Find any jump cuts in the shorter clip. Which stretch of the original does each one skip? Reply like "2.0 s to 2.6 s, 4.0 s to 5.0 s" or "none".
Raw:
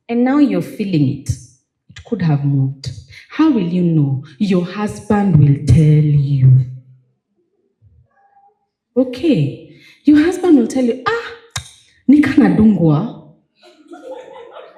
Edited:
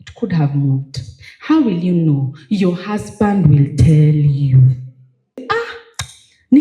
7.3 s to 11.0 s